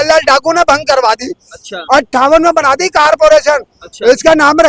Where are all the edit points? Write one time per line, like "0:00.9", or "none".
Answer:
none